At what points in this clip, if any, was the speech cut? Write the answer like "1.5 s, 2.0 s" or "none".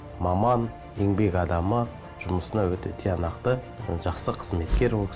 2.1 s, 3.7 s